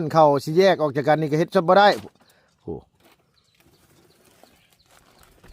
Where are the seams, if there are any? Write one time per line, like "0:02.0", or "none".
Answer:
none